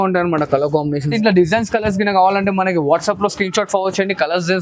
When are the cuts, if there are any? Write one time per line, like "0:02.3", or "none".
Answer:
0:01.1

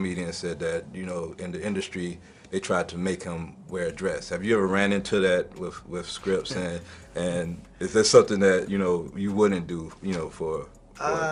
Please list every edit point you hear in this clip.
none

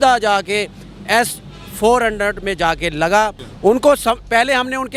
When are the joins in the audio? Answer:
0:03.4

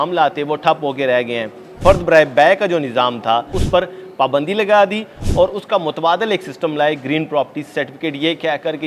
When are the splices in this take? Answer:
0:01.7
0:03.6

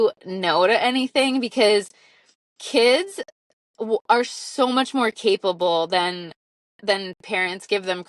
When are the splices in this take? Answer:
none

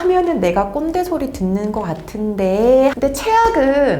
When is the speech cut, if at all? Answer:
0:03.0

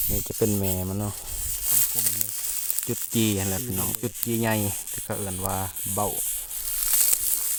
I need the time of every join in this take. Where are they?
none

